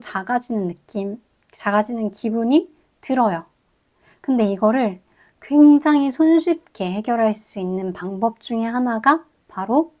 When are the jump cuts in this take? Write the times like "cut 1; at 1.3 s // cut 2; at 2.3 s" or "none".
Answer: none